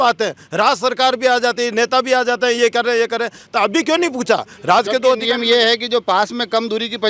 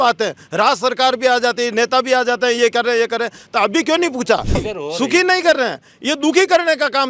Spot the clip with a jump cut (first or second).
second